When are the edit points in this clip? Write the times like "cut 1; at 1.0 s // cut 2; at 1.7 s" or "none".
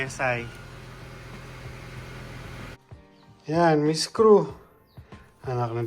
cut 1; at 2.7 s